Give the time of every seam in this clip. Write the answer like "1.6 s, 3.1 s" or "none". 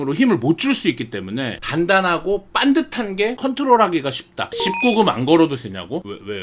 1.6 s, 3.4 s, 4.5 s